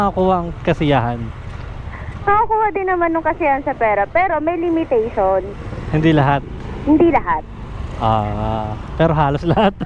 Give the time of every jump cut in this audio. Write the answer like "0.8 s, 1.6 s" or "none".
none